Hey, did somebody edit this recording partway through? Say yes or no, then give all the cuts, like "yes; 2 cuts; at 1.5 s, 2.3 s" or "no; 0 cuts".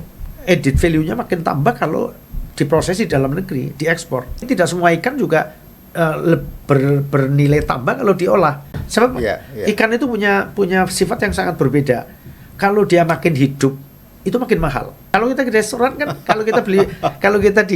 yes; 3 cuts; at 4.4 s, 8.7 s, 15.1 s